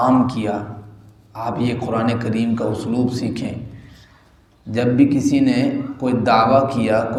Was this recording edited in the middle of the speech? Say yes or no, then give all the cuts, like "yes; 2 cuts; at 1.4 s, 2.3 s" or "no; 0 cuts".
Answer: no; 0 cuts